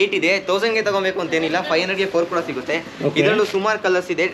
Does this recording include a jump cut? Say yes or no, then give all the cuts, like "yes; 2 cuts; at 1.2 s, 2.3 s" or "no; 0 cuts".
no; 0 cuts